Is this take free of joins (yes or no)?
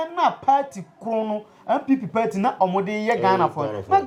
yes